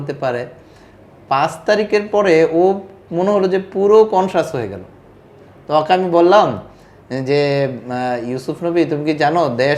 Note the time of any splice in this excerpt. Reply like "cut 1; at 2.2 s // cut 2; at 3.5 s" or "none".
none

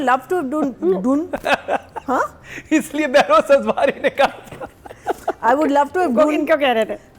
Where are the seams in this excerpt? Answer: none

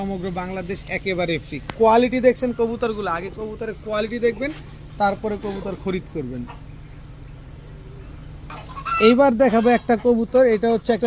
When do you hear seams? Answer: none

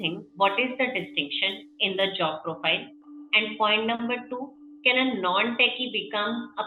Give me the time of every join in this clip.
none

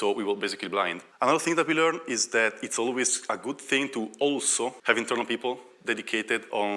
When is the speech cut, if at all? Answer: cut 1; at 1.0 s // cut 2; at 4.8 s

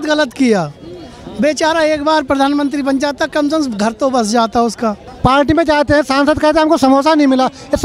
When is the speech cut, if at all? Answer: cut 1; at 5.1 s

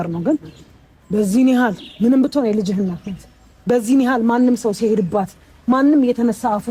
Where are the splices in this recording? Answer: none

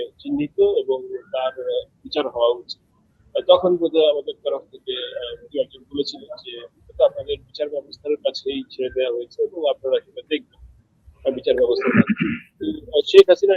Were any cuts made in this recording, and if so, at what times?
none

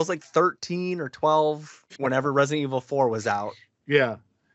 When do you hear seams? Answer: cut 1; at 1.9 s

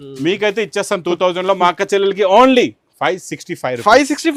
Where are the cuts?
none

